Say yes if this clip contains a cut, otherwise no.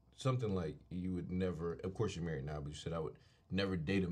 no